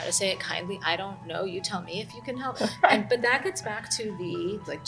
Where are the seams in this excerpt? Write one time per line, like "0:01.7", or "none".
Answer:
0:02.5